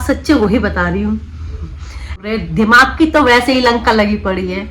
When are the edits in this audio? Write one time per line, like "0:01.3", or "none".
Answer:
0:02.2